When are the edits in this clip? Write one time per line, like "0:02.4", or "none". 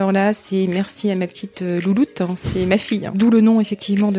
0:03.2